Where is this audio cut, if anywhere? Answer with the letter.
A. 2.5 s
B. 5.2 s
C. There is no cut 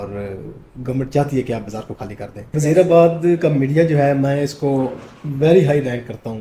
A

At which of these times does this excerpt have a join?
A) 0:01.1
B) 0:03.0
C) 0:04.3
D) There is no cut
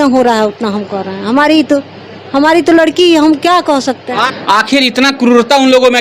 C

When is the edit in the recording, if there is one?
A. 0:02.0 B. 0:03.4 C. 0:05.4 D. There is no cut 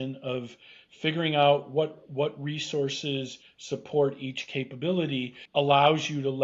C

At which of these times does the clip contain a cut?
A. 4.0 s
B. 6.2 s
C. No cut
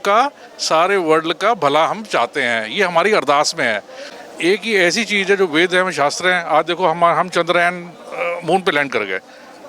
A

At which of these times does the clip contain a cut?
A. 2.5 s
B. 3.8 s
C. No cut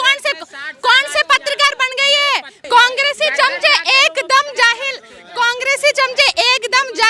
A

